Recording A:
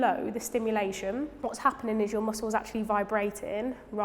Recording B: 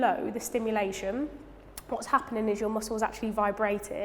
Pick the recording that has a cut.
A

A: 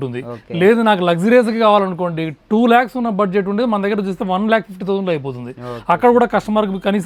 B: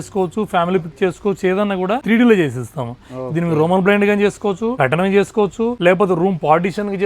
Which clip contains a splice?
B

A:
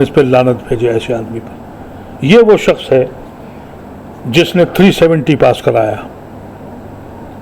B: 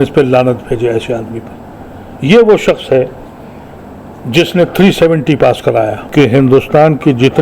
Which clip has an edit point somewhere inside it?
B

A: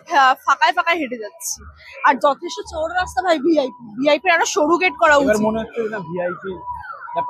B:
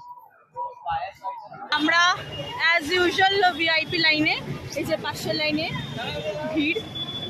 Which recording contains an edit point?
B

